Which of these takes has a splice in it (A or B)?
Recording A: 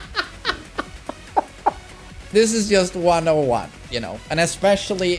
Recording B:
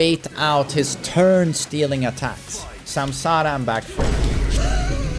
A